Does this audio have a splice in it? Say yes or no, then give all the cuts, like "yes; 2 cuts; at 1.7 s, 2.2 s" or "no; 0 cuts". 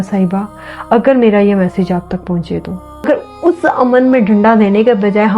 yes; 1 cut; at 3.1 s